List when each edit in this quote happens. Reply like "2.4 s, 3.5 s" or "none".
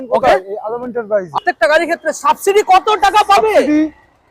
1.4 s